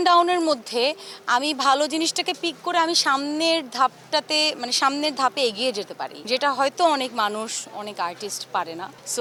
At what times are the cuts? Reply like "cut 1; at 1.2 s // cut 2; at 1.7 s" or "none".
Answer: none